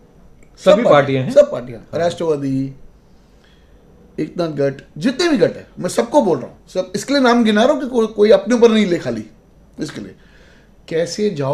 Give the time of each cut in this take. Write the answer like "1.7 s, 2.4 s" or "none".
none